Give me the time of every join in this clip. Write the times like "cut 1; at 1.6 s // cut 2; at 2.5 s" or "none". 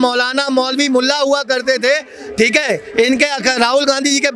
none